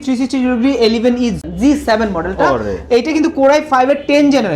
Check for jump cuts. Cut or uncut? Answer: uncut